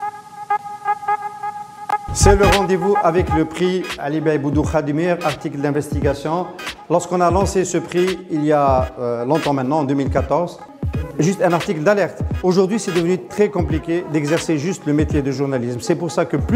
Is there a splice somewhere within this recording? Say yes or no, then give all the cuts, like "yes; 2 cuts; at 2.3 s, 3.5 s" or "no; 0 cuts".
yes; 1 cut; at 2.0 s